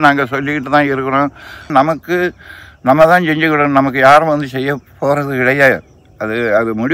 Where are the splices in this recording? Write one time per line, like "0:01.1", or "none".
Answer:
0:01.7